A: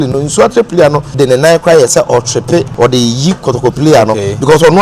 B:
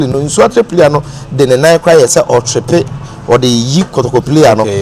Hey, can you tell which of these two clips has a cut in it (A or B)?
A